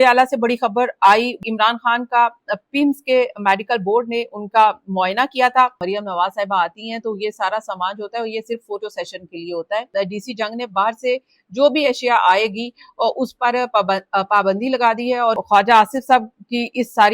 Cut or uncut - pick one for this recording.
cut